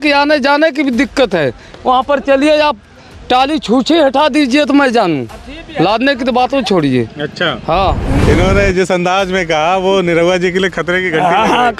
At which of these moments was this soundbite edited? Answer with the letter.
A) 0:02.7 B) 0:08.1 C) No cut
B